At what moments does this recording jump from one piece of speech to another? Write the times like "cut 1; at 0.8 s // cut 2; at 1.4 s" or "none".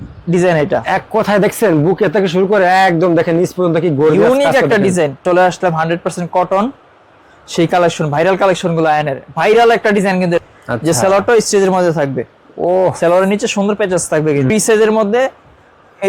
cut 1; at 5.2 s // cut 2; at 10.4 s // cut 3; at 14.5 s